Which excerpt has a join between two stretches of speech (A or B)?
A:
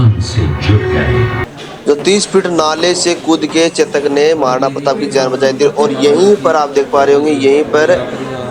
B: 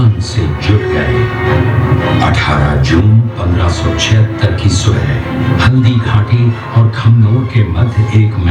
A